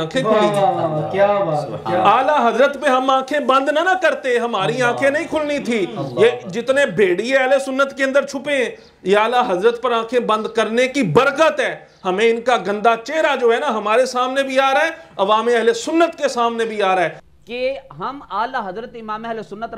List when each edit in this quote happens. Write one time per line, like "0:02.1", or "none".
0:17.2